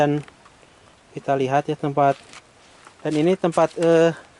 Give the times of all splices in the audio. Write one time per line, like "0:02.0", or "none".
none